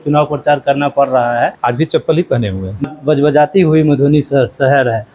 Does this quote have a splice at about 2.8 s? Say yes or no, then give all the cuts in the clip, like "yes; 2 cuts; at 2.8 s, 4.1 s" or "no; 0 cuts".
yes; 2 cuts; at 1.6 s, 2.8 s